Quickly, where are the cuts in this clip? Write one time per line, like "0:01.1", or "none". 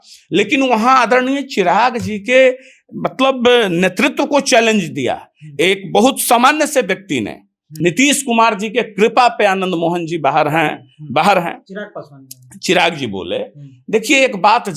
0:07.6